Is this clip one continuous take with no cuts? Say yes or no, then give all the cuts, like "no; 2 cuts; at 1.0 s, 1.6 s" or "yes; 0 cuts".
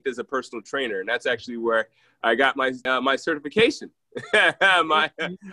yes; 0 cuts